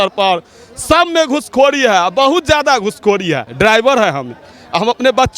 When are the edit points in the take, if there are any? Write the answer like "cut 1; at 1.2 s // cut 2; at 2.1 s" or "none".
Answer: cut 1; at 3.5 s